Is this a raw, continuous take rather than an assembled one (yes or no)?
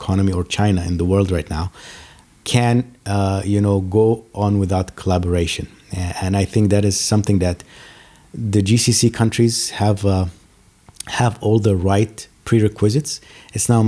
yes